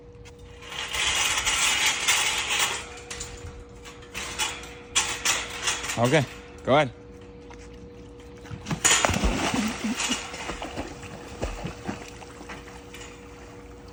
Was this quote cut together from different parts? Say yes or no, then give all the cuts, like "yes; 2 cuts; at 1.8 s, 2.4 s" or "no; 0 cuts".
no; 0 cuts